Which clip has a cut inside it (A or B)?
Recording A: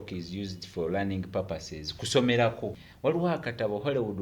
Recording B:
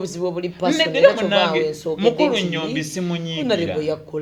A